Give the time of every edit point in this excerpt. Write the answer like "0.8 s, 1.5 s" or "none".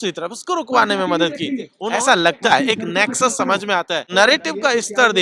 1.8 s, 4.1 s